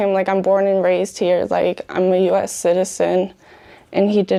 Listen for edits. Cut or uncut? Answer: uncut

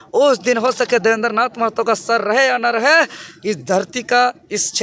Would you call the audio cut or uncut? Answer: uncut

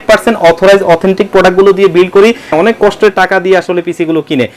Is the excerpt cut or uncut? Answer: cut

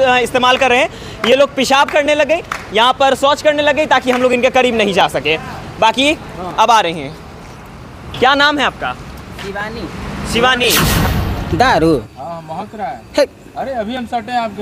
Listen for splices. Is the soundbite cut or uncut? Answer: cut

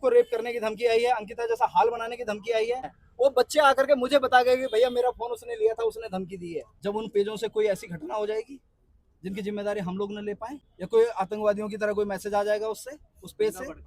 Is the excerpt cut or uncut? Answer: cut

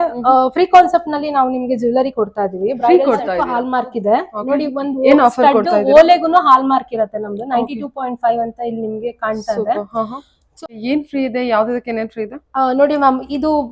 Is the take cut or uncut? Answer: cut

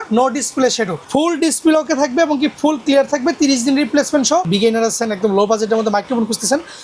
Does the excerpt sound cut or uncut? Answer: cut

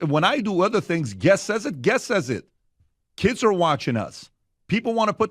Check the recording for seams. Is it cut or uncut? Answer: cut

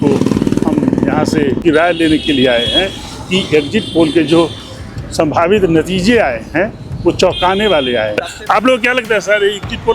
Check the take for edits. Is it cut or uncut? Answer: cut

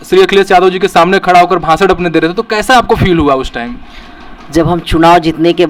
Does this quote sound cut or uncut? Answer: uncut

